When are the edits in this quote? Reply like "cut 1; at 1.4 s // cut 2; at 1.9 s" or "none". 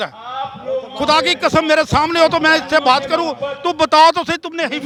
none